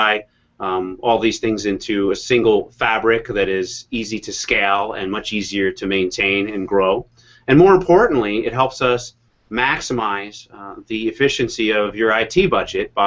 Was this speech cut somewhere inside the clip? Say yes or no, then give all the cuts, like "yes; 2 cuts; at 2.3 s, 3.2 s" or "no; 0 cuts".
yes; 1 cut; at 9.7 s